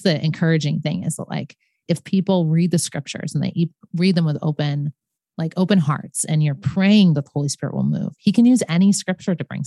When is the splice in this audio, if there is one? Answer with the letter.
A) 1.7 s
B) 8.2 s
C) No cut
C